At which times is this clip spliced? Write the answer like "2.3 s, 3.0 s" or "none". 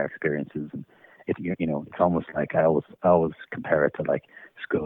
none